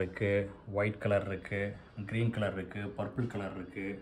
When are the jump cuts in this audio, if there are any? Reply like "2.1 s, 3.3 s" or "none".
none